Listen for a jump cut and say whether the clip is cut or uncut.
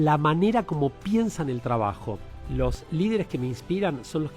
cut